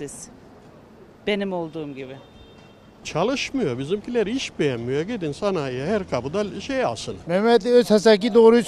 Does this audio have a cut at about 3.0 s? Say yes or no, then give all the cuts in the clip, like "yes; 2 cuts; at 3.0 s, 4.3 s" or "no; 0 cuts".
yes; 2 cuts; at 3.0 s, 7.1 s